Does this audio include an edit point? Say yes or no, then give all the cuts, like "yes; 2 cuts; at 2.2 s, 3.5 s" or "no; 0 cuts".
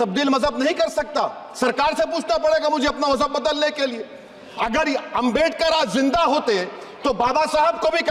no; 0 cuts